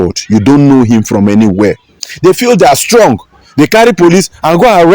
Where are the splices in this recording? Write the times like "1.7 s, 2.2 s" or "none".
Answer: 2.0 s